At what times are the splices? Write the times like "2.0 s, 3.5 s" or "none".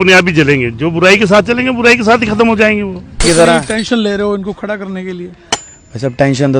3.2 s